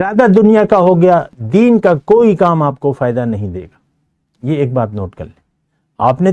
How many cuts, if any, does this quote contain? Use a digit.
1